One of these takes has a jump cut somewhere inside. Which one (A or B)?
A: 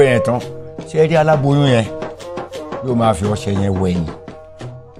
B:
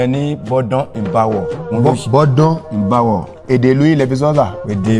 B